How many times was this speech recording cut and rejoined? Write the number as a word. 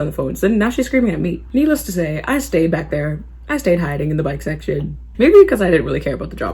two